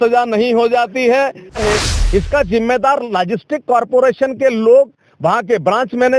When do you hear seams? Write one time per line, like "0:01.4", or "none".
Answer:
0:01.6